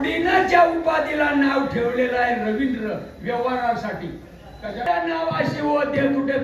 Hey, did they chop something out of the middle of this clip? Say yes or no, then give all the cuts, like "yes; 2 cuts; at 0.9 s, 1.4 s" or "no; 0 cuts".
yes; 1 cut; at 4.9 s